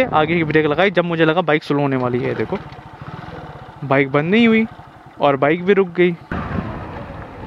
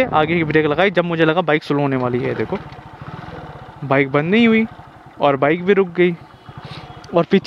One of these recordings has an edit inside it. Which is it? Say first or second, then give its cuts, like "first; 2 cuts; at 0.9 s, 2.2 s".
first; 1 cut; at 6.4 s